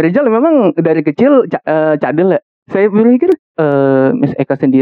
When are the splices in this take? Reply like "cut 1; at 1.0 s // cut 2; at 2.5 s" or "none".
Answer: cut 1; at 3.5 s